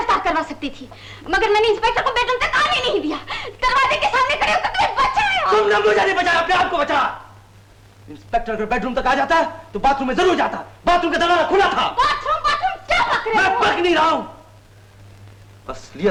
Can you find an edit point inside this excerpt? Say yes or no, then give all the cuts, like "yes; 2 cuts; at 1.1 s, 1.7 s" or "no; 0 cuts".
no; 0 cuts